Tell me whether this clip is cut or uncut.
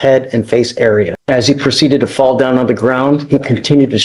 cut